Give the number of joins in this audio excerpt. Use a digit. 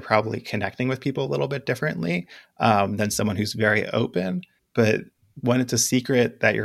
2